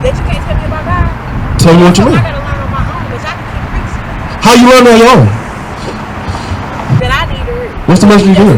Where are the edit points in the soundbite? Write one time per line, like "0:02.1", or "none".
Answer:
0:07.0